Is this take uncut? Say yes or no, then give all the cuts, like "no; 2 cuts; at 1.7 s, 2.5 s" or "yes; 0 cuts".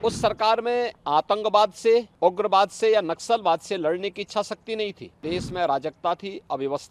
no; 3 cuts; at 1.0 s, 2.1 s, 5.2 s